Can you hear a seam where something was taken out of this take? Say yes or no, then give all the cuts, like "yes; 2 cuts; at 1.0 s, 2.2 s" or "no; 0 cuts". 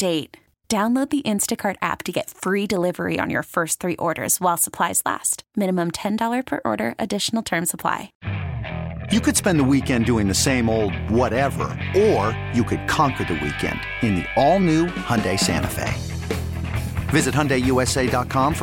yes; 1 cut; at 8.1 s